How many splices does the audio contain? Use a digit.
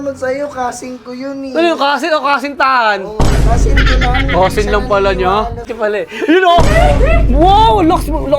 1